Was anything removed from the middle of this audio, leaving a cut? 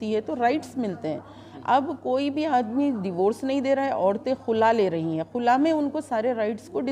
no; 0 cuts

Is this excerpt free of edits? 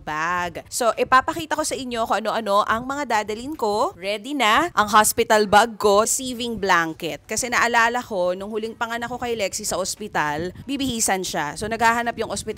no; 2 cuts; at 6.1 s, 10.6 s

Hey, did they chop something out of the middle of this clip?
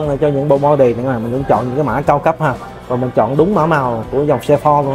no; 0 cuts

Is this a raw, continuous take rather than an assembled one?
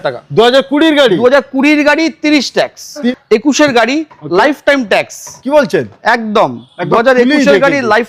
no; 1 cut; at 3.1 s

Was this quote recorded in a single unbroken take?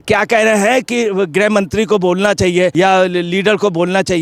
no; 1 cut; at 2.7 s

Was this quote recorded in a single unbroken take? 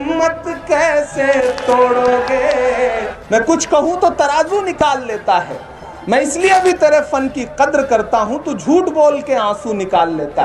no; 1 cut; at 3.1 s

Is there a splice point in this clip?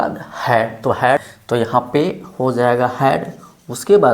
yes; 1 cut; at 1.2 s

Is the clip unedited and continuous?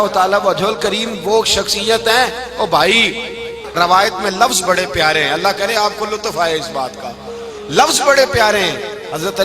no; 1 cut; at 3.6 s

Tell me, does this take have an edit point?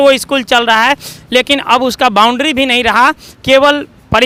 no; 0 cuts

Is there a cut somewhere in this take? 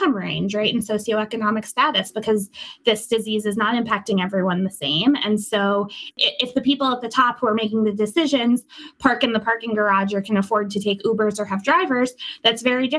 yes; 1 cut; at 6.0 s

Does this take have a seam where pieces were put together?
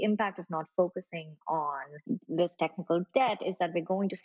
yes; 1 cut; at 1.9 s

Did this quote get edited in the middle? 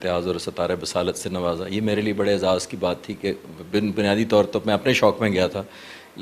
no; 0 cuts

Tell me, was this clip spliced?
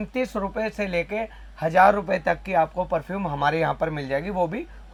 no; 0 cuts

